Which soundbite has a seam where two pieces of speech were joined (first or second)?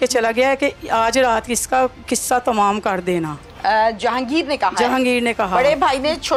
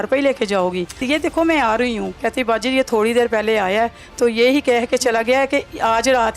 second